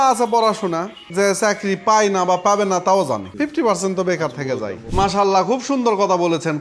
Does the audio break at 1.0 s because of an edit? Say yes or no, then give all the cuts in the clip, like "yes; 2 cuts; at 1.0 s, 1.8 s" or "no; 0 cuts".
yes; 3 cuts; at 1.0 s, 3.3 s, 4.8 s